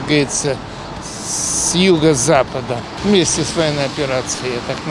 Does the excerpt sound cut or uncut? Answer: cut